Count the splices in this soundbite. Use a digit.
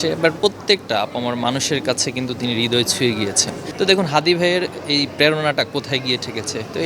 0